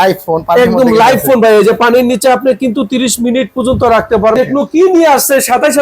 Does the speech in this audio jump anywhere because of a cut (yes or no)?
yes